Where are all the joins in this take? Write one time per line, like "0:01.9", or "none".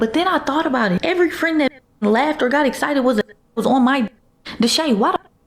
0:01.0